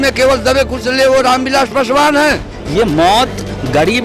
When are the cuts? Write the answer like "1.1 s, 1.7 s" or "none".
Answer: 2.5 s